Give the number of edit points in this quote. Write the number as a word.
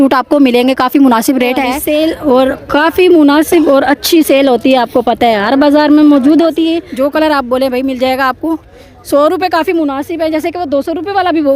two